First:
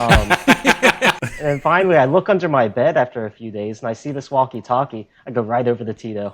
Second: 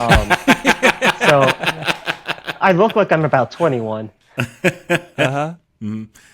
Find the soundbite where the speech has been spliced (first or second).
first